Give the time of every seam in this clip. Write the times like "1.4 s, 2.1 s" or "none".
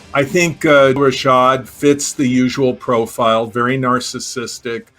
1.0 s